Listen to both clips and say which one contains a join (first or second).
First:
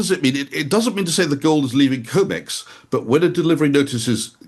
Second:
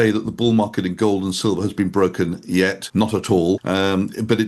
second